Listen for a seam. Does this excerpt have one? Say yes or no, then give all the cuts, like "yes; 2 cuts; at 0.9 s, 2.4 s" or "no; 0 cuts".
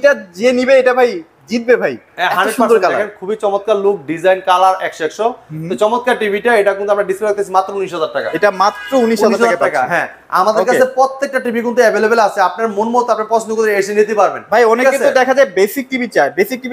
no; 0 cuts